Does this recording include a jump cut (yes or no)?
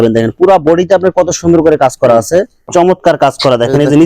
yes